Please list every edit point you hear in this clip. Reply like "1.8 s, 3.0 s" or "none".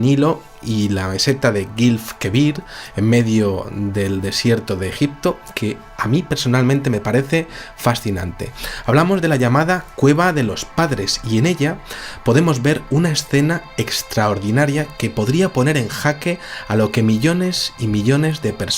none